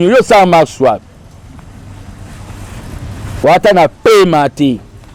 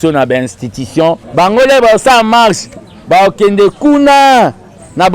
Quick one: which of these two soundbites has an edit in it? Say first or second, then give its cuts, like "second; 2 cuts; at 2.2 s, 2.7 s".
second; 1 cut; at 1.2 s